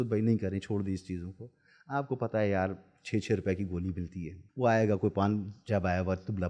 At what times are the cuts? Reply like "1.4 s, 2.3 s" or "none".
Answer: 4.4 s